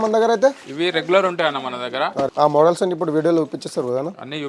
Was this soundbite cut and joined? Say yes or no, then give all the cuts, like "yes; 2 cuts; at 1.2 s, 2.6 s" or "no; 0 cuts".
yes; 1 cut; at 2.3 s